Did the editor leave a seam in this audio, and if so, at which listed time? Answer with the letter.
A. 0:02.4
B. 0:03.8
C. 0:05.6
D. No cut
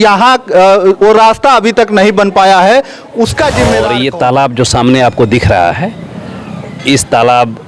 B